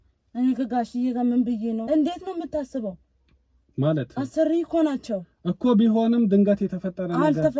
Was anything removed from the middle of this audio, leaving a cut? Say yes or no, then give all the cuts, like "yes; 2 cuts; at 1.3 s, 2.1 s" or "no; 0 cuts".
yes; 1 cut; at 1.8 s